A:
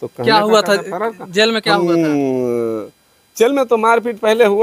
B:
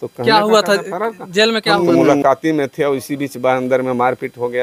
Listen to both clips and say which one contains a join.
B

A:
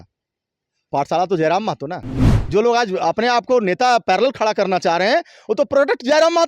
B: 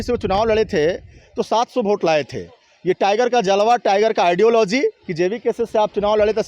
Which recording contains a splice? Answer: A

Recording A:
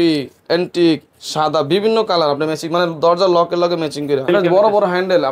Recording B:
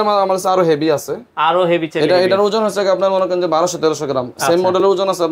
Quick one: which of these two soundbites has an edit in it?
A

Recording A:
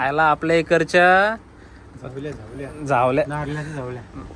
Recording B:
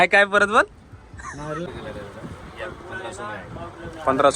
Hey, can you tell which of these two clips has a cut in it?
B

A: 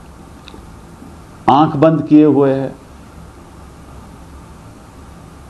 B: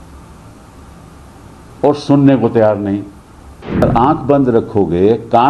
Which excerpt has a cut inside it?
B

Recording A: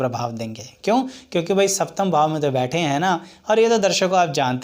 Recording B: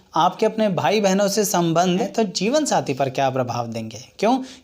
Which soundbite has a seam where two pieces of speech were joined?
B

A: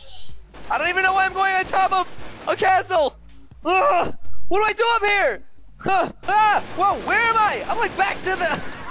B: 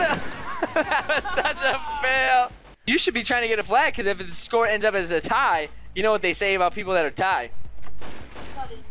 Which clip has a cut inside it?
B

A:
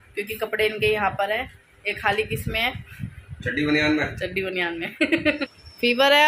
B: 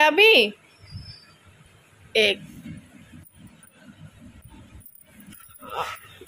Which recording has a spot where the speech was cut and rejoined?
A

